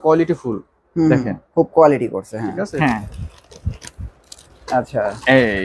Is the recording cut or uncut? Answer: uncut